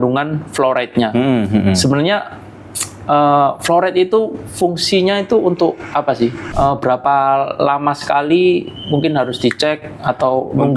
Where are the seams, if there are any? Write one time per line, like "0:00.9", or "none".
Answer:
0:06.4